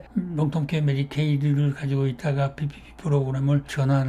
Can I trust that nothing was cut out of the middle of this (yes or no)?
yes